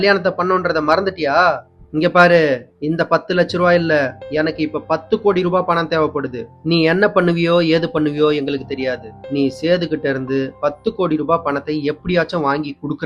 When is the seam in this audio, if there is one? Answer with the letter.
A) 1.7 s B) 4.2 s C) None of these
C